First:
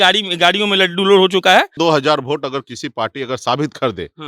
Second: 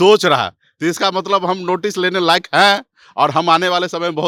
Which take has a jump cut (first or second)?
first